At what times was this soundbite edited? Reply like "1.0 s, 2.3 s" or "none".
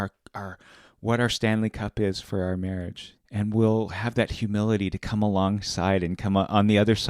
2.9 s